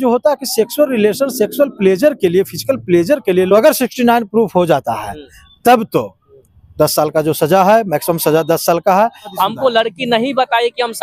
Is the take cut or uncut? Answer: cut